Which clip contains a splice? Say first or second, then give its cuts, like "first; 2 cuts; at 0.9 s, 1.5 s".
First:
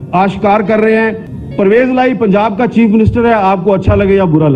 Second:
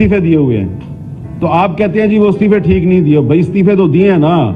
first; 1 cut; at 1.3 s